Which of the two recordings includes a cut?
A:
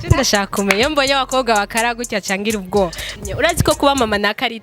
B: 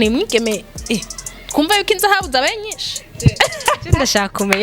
A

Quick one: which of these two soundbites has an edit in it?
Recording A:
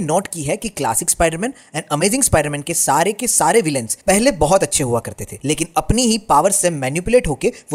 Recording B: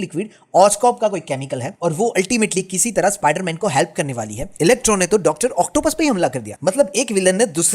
B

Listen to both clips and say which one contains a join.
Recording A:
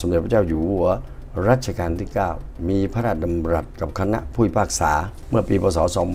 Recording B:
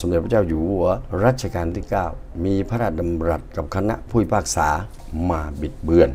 B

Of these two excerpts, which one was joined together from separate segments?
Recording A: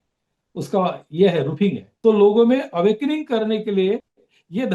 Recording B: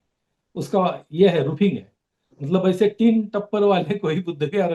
A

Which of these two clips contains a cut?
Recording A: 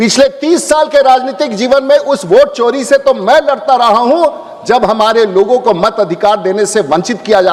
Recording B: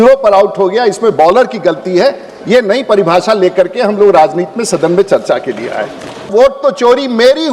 B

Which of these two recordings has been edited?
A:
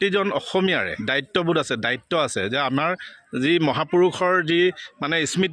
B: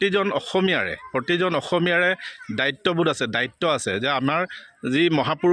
A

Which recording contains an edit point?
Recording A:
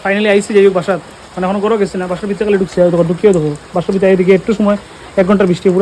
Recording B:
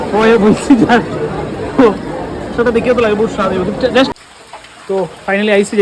B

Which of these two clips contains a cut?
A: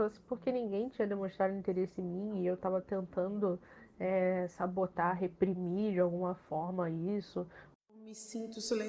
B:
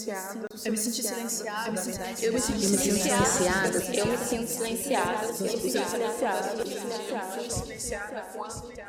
A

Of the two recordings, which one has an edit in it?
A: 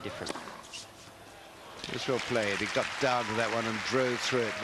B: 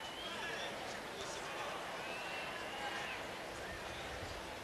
A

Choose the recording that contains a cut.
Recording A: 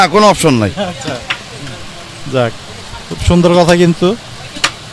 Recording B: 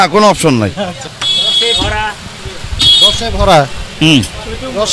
B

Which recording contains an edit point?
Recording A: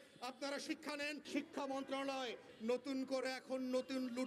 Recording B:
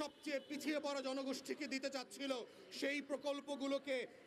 A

